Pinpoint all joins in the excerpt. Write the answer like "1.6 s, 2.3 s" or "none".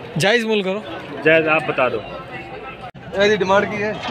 3.0 s

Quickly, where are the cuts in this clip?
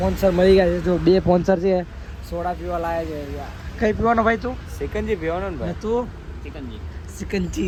none

